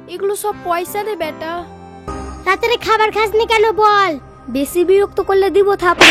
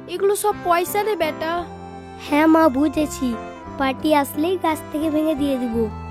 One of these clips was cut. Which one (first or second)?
first